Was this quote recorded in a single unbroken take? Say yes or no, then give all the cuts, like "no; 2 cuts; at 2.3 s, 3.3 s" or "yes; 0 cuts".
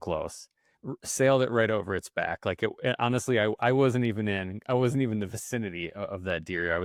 yes; 0 cuts